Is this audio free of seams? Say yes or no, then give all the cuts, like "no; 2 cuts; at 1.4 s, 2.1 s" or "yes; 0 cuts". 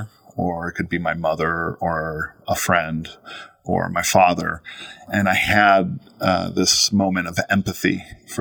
no; 1 cut; at 5.0 s